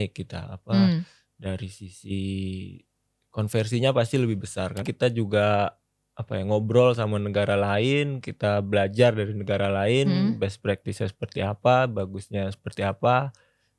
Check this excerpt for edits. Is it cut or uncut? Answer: cut